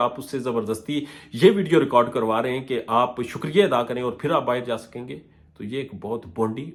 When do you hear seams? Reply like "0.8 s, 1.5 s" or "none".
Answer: none